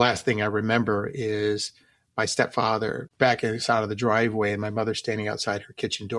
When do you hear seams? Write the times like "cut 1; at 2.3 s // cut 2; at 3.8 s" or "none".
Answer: cut 1; at 3.0 s